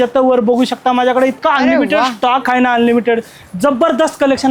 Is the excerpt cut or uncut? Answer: uncut